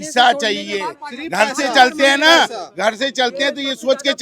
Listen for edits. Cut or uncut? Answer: uncut